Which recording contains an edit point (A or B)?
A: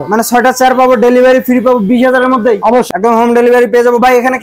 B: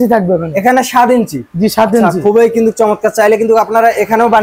A